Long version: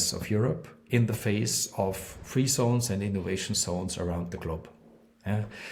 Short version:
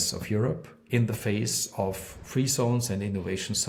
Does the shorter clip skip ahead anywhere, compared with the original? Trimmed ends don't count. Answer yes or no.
no